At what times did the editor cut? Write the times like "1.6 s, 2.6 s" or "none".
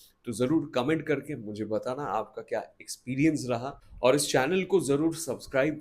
3.8 s